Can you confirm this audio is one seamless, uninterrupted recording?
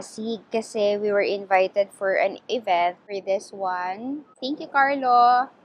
no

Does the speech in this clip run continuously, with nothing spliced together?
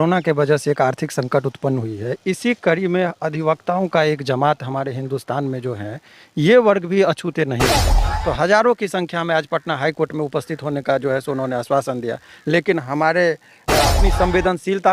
no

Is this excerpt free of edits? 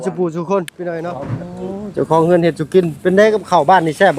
no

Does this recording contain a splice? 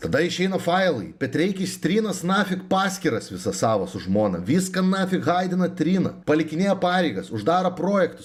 no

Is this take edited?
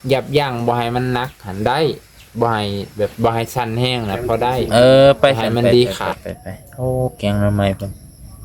yes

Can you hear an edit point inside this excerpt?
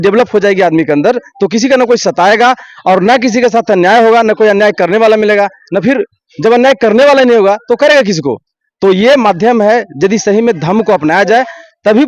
no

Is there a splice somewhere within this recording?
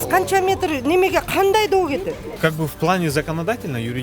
yes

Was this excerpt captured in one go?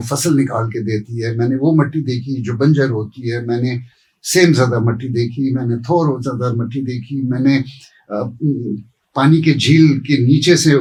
yes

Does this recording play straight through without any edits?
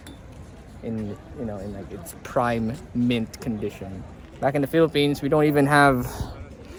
yes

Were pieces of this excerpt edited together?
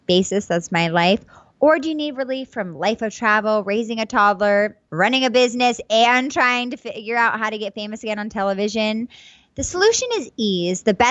yes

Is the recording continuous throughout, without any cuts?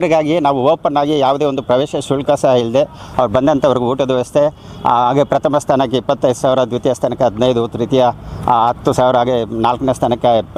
yes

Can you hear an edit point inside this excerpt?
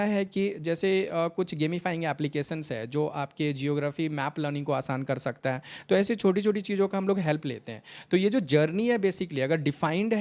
no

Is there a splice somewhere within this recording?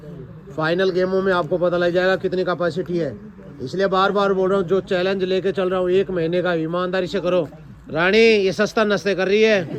no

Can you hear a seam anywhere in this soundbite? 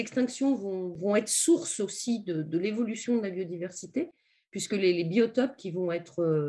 yes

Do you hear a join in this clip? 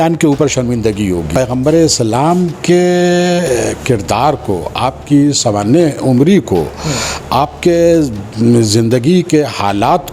yes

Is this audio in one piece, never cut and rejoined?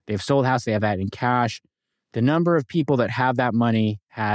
yes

